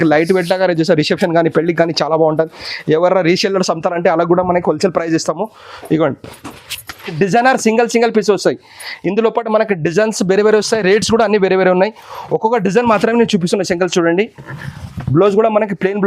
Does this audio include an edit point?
yes; 1 cut; at 7.1 s

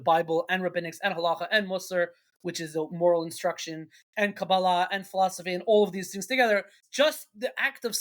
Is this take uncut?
no; 1 cut; at 6.8 s

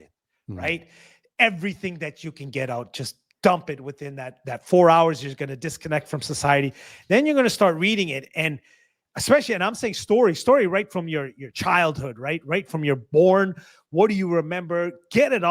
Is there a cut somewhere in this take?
no; 0 cuts

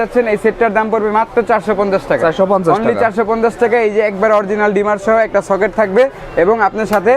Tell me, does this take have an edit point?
no; 0 cuts

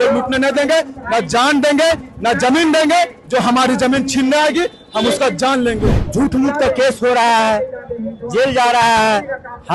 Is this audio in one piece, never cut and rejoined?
no; 1 cut; at 6.0 s

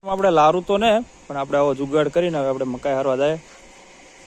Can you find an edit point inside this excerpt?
no; 0 cuts

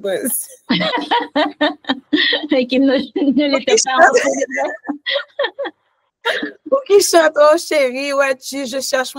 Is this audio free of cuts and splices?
yes; 0 cuts

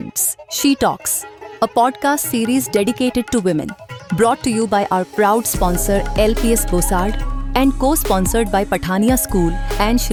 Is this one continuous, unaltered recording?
yes; 0 cuts

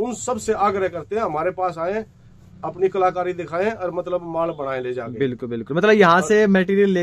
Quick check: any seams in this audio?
no; 0 cuts

